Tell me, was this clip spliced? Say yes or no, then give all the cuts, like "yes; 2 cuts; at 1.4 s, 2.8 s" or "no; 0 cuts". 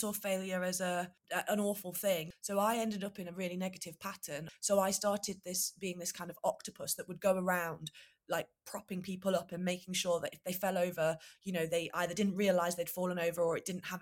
yes; 3 cuts; at 1.2 s, 2.3 s, 4.5 s